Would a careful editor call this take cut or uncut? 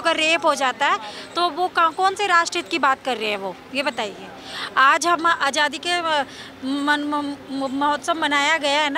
uncut